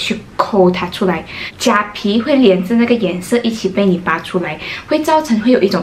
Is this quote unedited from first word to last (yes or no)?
no